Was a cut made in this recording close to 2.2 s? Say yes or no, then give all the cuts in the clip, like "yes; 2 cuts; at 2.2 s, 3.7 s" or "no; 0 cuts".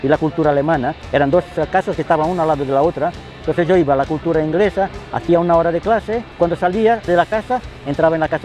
no; 0 cuts